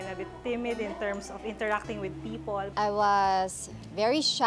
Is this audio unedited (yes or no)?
no